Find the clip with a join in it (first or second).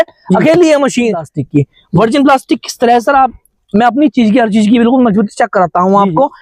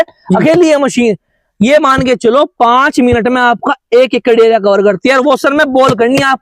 first